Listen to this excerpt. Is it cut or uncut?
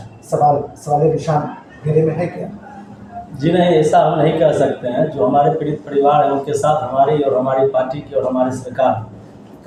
uncut